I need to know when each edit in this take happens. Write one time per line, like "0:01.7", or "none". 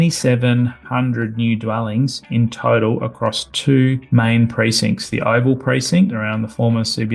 none